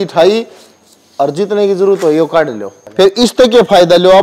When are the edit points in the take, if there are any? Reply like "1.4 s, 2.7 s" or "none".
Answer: 2.8 s